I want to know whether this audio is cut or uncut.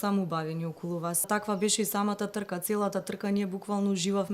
cut